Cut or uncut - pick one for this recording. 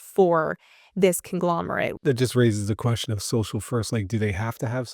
cut